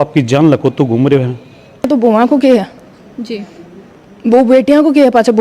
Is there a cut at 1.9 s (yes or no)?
yes